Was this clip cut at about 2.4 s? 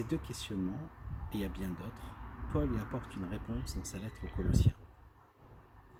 no; 0 cuts

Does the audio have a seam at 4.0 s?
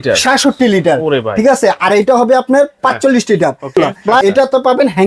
yes; 1 cut; at 4.0 s

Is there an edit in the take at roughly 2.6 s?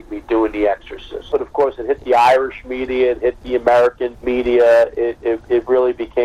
no; 2 cuts; at 1.3 s, 4.1 s

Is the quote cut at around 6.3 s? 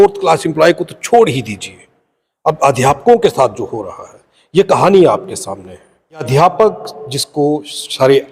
yes; 1 cut; at 6.3 s

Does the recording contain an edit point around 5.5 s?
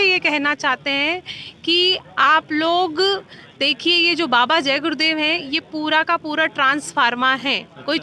no; 0 cuts

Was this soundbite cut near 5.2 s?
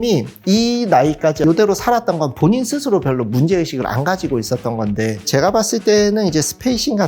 yes; 1 cut; at 5.2 s

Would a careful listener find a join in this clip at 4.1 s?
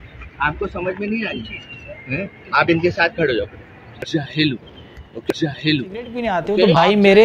yes; 2 cuts; at 4.1 s, 6.0 s

